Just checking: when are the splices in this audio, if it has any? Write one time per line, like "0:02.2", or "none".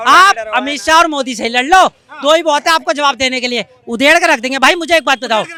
none